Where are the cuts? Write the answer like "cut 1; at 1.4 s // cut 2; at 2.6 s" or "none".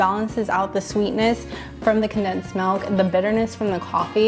none